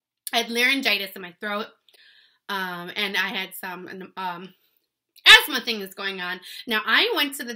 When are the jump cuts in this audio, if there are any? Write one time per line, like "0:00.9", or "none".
none